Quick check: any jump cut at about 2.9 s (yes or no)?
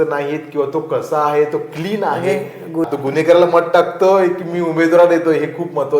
yes